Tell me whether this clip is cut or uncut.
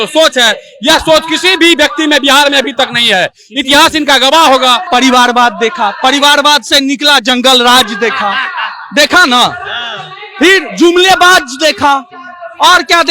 cut